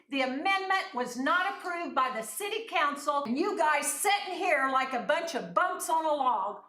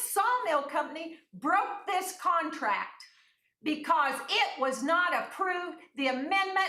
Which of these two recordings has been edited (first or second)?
first